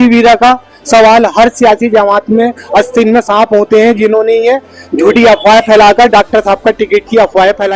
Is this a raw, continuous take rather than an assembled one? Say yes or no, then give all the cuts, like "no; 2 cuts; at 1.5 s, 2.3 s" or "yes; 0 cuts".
yes; 0 cuts